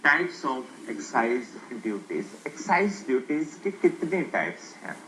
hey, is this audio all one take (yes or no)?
yes